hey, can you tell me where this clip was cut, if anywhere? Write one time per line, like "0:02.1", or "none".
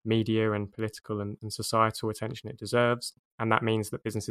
0:03.2